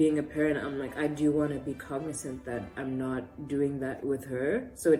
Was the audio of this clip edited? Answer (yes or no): no